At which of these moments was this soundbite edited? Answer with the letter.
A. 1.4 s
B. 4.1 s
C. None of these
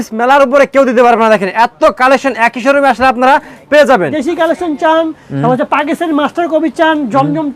B